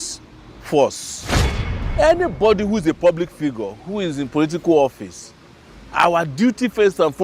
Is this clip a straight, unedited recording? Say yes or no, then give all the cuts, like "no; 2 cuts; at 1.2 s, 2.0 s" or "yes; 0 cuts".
no; 1 cut; at 1.6 s